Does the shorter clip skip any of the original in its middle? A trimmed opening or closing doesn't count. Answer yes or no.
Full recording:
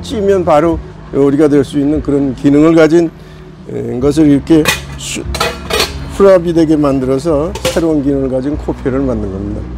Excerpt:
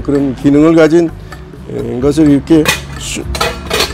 no